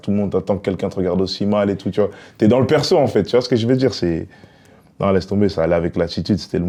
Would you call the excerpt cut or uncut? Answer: uncut